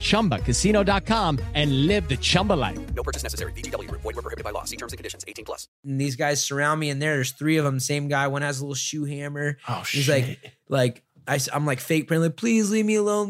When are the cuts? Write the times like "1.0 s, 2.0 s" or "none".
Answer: 5.8 s